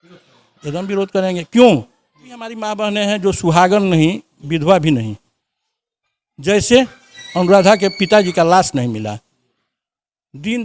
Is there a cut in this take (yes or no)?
yes